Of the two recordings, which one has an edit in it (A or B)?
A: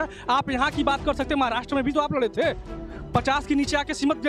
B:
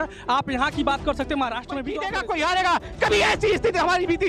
B